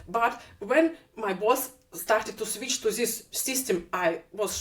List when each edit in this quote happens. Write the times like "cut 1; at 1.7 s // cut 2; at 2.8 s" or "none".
none